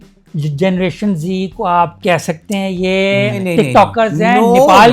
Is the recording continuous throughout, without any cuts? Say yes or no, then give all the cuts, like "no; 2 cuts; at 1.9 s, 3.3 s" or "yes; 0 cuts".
no; 1 cut; at 3.4 s